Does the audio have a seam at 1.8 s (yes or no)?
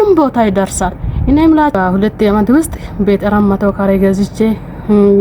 yes